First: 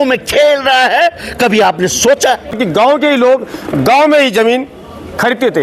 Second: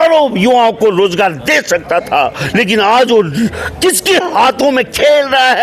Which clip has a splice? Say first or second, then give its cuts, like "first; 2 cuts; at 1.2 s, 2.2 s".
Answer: first; 1 cut; at 2.5 s